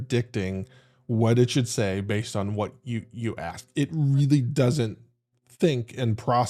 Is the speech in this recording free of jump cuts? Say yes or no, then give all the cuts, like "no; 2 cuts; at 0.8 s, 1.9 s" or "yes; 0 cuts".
yes; 0 cuts